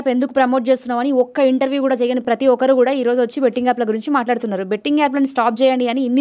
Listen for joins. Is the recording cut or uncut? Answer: uncut